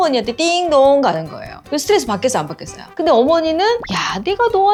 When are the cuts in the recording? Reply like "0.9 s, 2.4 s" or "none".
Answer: none

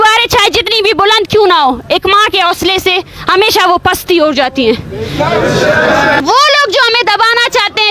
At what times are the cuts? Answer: 6.2 s

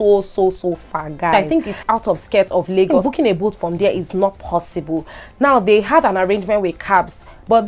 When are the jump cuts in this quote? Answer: 1.3 s, 3.0 s

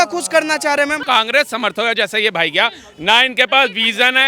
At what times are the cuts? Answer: 1.0 s

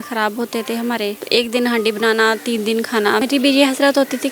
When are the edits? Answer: 1.2 s, 3.3 s

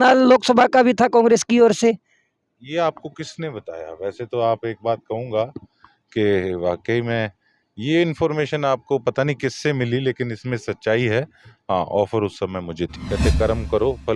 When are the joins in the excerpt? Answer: 13.0 s

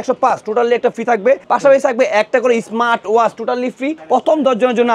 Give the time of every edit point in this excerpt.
1.4 s, 4.0 s

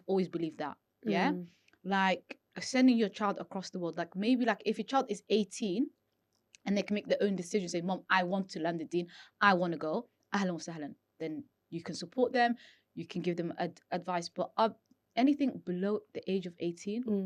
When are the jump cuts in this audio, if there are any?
none

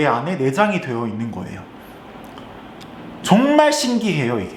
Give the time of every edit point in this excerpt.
none

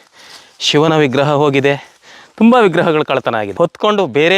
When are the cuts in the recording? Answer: 3.5 s

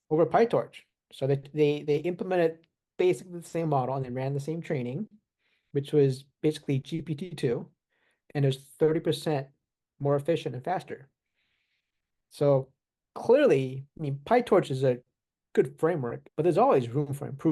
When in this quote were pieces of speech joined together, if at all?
16.2 s

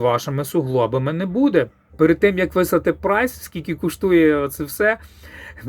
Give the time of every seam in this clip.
1.8 s

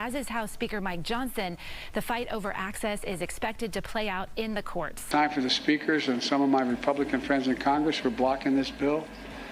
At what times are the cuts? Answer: 5.1 s

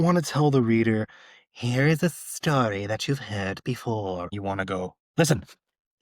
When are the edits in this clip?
4.4 s

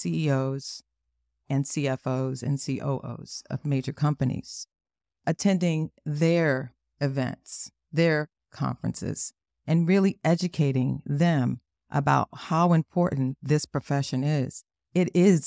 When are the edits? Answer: none

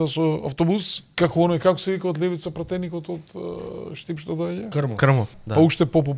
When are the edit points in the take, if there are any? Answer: 1.0 s, 5.4 s

